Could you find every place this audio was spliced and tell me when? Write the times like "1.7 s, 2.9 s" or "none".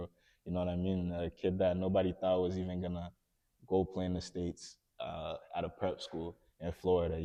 none